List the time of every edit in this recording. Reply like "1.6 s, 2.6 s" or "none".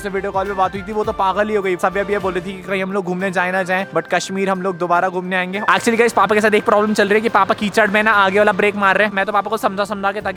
none